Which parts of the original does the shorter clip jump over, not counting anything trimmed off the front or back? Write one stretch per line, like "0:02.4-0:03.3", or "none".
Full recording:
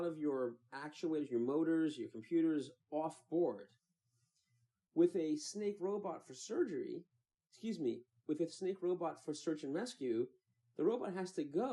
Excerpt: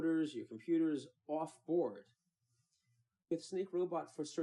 0:04.9-0:08.4